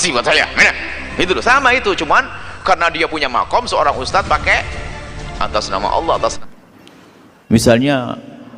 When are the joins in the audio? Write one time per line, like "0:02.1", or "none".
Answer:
0:06.4